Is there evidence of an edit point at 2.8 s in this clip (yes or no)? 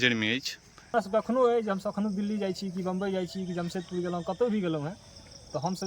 no